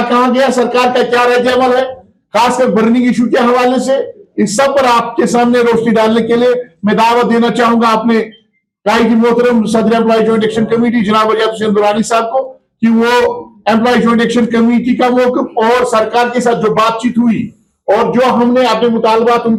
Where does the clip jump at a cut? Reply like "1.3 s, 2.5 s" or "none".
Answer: none